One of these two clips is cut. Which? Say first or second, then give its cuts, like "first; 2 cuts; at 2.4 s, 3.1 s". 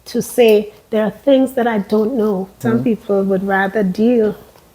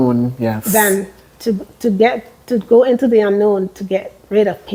first; 1 cut; at 2.6 s